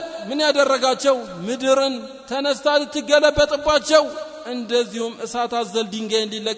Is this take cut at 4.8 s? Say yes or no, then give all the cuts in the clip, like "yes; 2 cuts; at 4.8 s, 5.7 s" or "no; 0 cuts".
no; 0 cuts